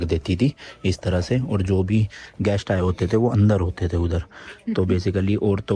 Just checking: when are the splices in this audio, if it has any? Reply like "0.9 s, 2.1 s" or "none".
none